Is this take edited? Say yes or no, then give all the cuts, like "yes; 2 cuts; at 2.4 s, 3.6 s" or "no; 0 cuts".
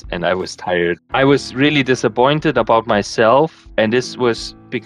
yes; 2 cuts; at 1.0 s, 3.6 s